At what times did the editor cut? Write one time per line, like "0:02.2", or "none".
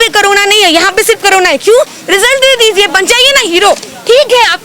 0:02.0